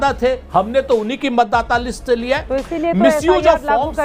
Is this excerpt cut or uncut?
uncut